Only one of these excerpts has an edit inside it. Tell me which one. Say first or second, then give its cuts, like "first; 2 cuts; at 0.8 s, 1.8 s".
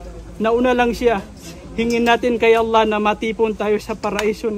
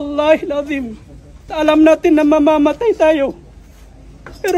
second; 1 cut; at 1.5 s